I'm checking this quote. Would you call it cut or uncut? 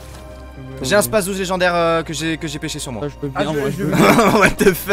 uncut